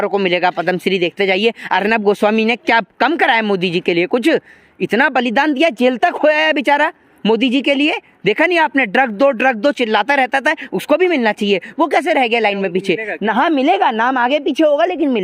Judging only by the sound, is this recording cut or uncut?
uncut